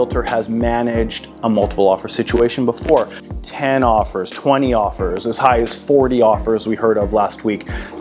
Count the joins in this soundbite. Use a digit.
1